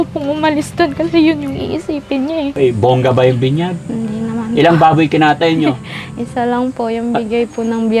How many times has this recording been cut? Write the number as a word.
one